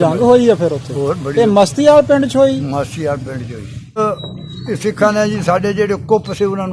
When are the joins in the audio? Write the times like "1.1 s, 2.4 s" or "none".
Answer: 4.0 s